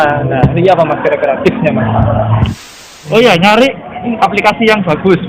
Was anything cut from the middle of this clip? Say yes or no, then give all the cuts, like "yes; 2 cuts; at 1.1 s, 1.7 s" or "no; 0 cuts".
yes; 2 cuts; at 2.8 s, 4.2 s